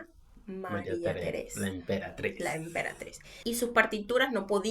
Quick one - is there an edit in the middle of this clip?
yes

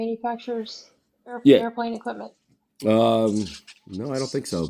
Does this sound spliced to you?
no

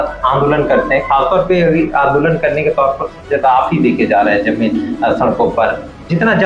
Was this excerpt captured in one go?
yes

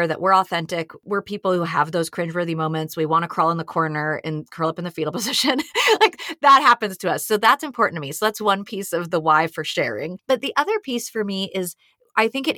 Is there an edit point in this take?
yes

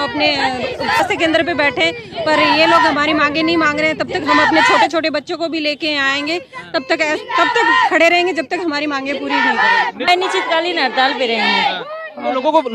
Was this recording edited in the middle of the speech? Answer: yes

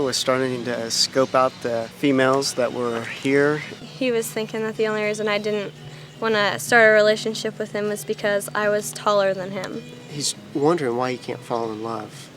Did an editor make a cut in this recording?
yes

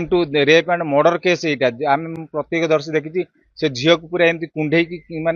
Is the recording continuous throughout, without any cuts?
yes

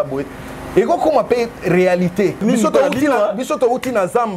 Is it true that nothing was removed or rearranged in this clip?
no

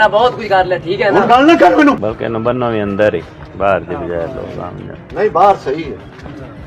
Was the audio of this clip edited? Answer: yes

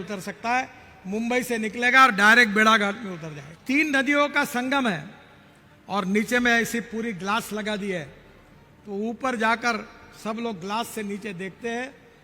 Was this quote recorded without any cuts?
no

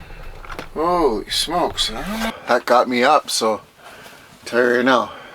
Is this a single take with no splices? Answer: no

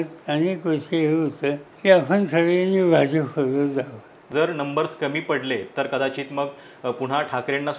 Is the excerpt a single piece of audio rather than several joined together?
no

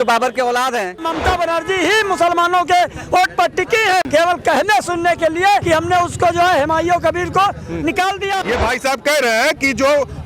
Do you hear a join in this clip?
yes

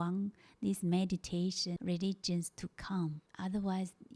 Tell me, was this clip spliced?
yes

